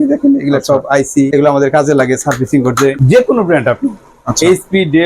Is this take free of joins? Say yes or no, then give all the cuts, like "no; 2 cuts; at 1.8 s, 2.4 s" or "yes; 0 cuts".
no; 2 cuts; at 1.3 s, 3.0 s